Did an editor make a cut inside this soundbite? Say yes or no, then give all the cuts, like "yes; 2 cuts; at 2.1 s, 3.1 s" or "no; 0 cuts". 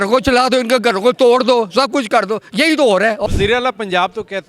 yes; 1 cut; at 3.3 s